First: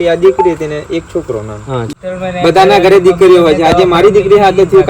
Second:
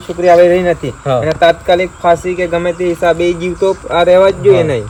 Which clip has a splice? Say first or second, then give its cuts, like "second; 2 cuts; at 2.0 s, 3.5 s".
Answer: first; 1 cut; at 1.9 s